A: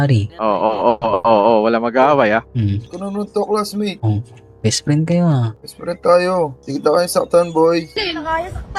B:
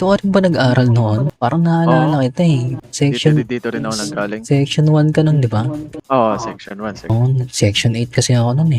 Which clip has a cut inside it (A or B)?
B